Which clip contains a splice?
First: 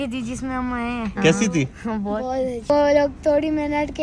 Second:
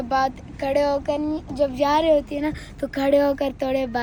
first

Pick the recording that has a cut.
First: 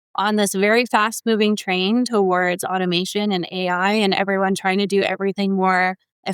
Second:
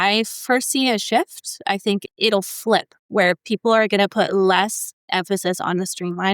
second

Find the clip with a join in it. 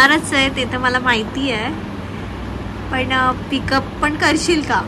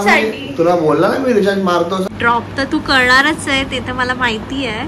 second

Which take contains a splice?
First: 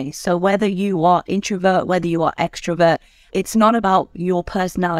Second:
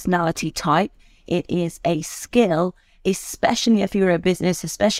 first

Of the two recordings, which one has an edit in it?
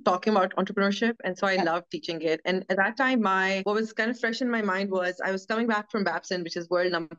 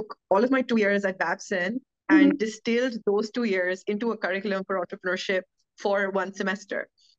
first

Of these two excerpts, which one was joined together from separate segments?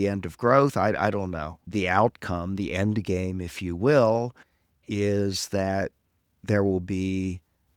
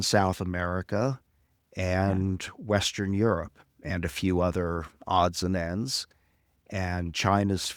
first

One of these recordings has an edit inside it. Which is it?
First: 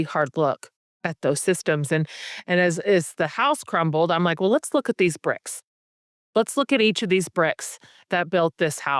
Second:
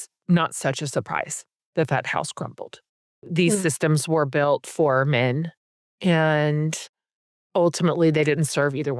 second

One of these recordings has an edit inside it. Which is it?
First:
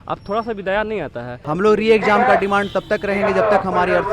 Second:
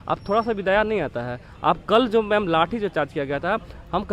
first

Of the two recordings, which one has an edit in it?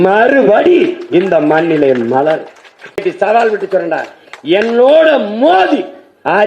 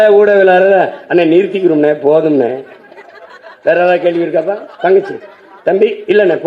first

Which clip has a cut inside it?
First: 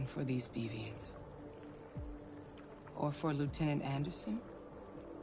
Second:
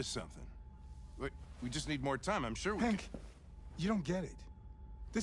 first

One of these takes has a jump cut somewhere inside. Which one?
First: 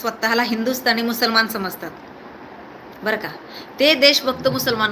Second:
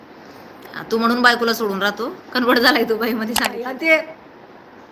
second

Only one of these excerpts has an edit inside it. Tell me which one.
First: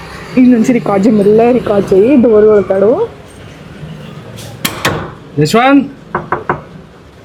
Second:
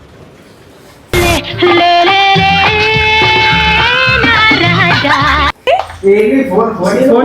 second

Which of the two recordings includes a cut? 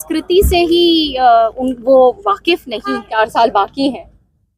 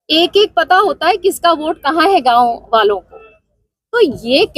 first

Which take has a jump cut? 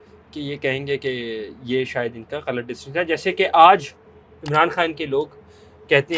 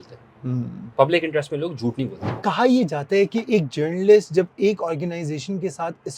second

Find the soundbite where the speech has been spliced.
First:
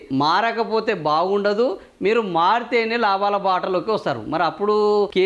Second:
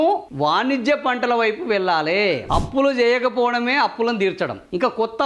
second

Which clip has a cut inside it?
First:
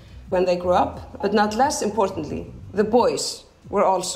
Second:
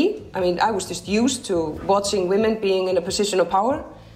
first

